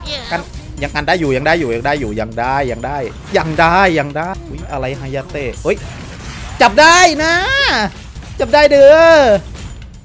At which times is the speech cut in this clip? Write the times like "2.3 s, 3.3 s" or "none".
4.3 s